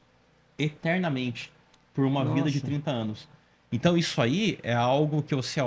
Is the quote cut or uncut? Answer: uncut